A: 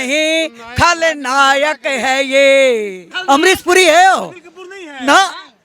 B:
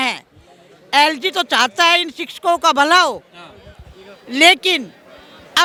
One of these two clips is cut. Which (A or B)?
A